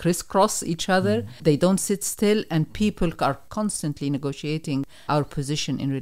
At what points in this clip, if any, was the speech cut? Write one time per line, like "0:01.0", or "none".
0:01.3
0:03.4
0:05.0